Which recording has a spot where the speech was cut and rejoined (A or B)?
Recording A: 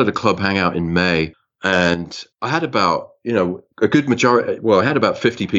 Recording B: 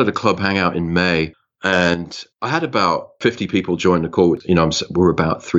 B